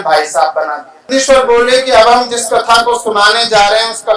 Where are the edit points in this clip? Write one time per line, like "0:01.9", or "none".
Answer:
0:01.1